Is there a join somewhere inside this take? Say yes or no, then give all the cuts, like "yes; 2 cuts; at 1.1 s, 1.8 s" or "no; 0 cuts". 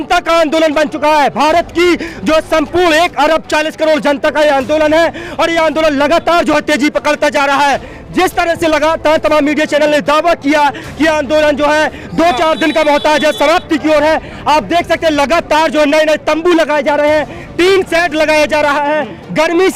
no; 0 cuts